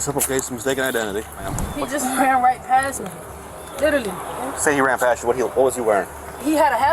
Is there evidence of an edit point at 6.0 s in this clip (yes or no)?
no